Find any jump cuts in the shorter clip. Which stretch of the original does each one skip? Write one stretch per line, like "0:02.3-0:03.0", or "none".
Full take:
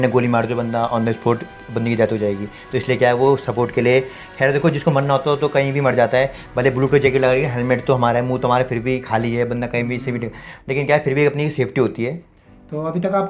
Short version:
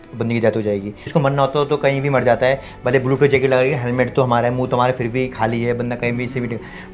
0:02.6-0:04.8